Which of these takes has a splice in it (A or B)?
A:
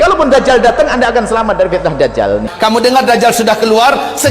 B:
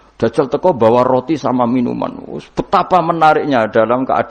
A